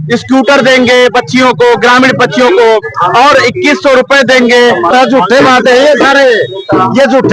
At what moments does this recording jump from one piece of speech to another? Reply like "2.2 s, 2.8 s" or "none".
4.9 s